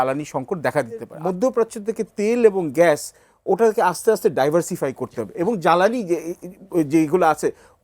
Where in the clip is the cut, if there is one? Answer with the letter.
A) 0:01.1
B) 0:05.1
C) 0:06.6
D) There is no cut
A